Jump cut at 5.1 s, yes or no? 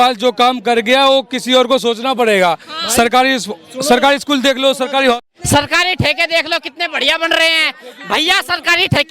yes